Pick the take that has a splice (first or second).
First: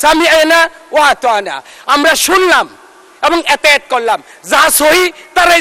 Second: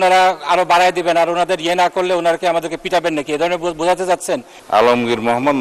second